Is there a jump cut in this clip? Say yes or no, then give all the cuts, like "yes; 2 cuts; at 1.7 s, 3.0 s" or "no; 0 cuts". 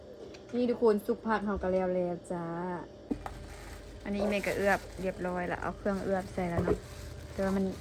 yes; 1 cut; at 3.0 s